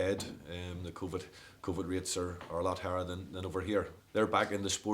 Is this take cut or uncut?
cut